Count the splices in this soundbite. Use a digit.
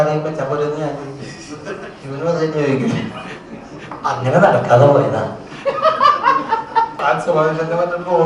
1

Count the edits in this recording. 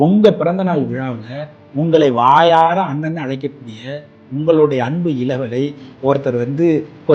0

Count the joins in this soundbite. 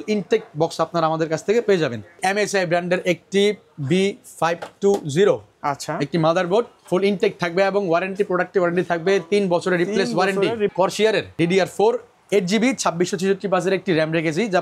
2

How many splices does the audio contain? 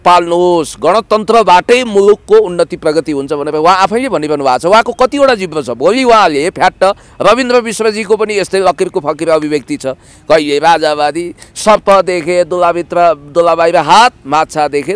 0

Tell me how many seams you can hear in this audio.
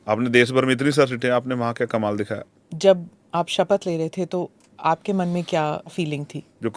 2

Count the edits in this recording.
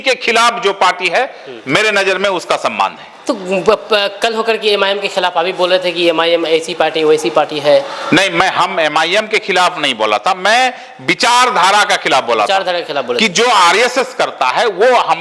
0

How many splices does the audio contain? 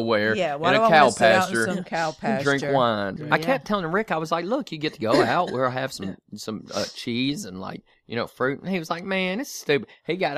0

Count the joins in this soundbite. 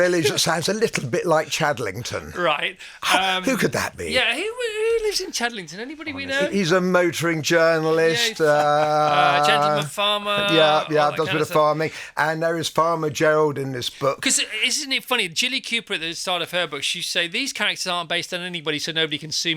0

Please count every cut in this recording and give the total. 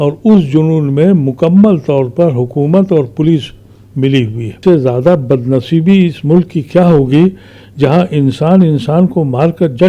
1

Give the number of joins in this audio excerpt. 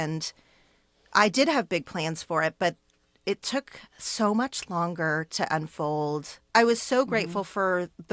1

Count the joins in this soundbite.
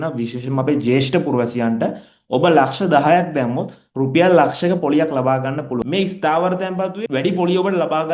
2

